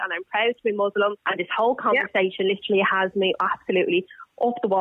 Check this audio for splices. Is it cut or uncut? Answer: cut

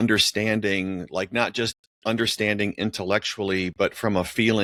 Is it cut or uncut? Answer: uncut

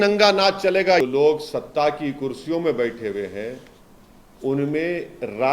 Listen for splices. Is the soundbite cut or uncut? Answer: cut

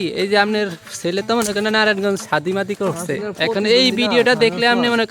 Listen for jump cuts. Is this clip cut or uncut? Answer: uncut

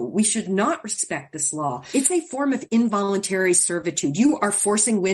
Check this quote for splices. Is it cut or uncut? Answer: cut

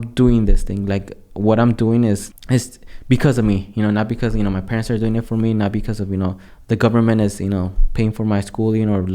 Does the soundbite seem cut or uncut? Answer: cut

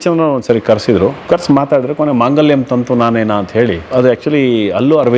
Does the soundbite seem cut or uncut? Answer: cut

